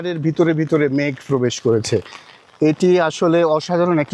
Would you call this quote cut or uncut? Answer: uncut